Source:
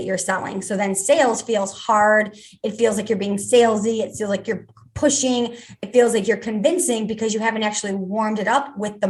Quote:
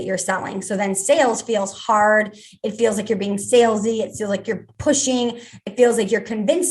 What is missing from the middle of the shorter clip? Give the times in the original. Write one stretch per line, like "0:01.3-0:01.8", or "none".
0:04.7-0:04.9